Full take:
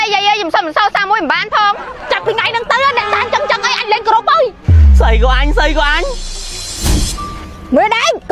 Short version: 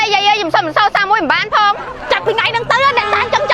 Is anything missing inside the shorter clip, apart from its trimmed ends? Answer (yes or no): no